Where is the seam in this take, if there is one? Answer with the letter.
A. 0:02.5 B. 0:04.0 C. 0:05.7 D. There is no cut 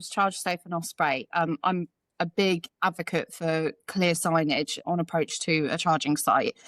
D